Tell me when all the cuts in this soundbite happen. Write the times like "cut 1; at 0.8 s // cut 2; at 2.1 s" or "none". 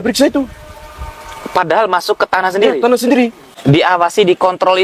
cut 1; at 3.5 s